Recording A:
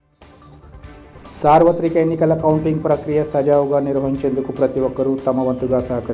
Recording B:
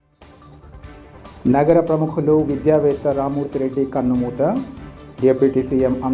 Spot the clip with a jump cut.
B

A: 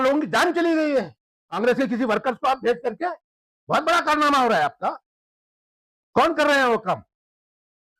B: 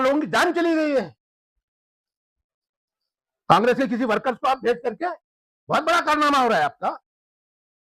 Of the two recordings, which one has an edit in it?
A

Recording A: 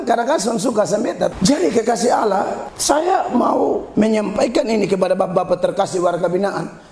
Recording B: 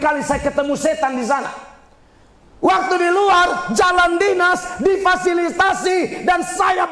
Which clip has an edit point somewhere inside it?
A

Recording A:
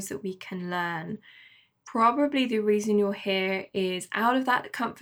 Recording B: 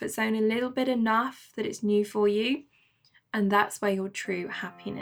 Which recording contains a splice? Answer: A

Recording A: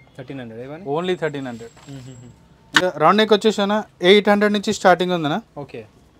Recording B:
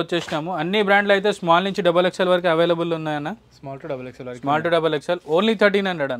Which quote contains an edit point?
A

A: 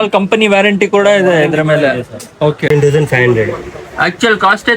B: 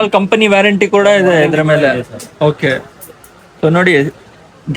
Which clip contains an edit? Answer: A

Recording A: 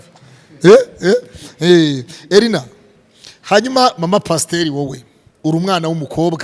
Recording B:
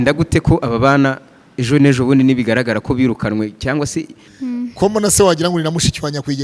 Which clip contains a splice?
B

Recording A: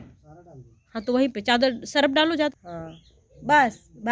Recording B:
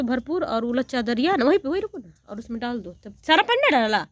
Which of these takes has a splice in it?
A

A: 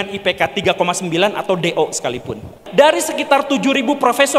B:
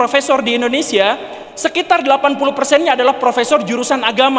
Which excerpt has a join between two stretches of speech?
A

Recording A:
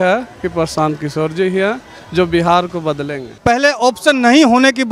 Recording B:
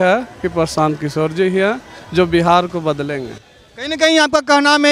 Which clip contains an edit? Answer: A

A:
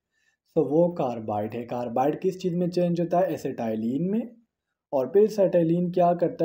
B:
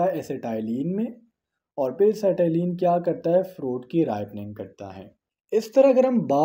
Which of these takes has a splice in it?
B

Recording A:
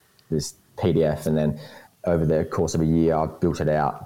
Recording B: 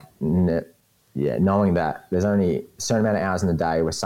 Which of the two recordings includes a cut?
A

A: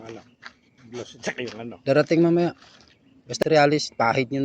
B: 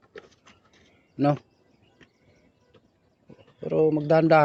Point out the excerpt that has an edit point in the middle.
A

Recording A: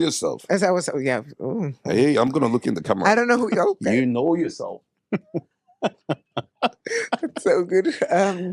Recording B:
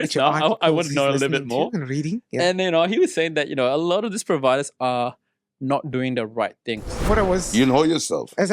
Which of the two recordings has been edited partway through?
B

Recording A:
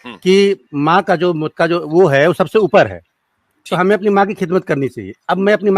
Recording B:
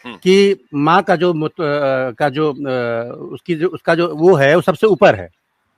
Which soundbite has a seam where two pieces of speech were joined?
A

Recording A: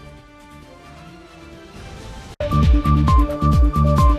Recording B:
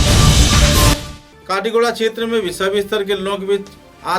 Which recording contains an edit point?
B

